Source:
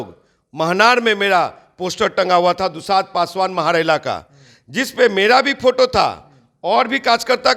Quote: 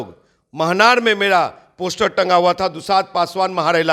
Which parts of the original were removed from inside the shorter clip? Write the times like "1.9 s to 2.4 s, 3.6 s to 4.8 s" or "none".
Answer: none